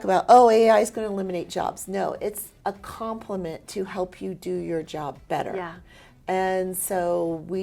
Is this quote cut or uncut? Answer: uncut